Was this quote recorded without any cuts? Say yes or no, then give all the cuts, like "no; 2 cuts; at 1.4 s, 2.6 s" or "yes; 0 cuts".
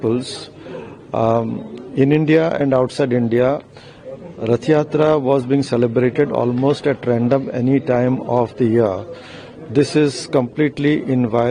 yes; 0 cuts